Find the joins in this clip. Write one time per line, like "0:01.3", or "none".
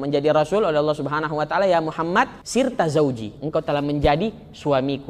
0:02.4